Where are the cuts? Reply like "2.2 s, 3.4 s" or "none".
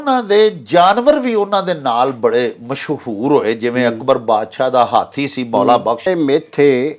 6.1 s

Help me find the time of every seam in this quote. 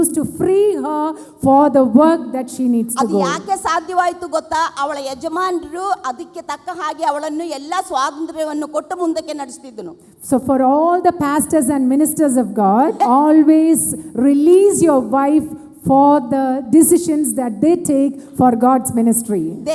13.0 s

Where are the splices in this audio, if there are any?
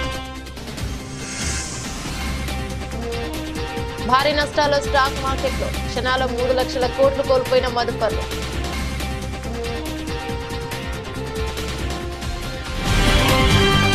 none

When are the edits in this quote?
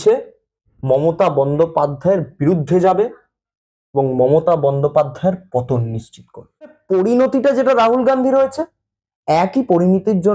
6.8 s

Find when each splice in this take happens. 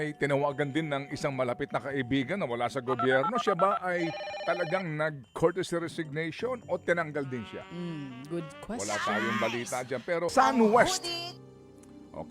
10.3 s

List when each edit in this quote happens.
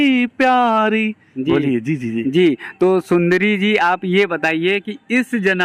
none

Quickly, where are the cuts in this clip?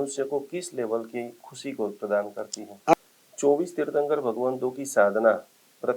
2.9 s

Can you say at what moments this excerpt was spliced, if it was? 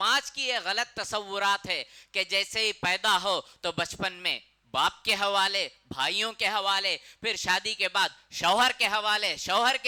none

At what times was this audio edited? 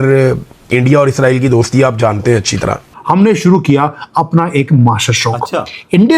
3.0 s

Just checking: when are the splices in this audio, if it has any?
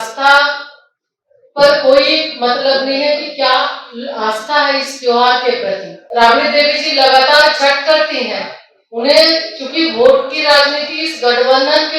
6.0 s

